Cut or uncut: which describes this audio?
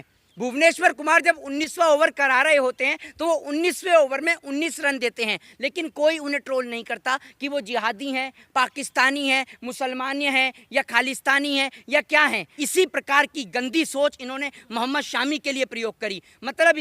cut